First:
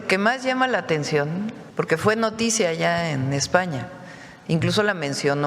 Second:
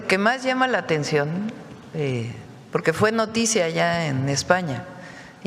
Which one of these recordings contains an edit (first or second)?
first